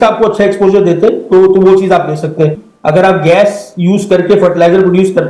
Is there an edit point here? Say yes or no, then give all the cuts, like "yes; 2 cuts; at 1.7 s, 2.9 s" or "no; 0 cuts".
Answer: yes; 1 cut; at 2.7 s